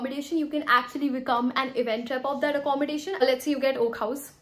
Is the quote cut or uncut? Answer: cut